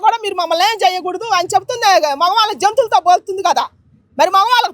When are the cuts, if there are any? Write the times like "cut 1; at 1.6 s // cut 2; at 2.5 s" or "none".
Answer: none